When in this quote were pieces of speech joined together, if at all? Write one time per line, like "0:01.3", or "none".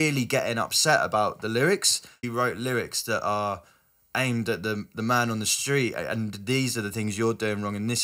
0:02.2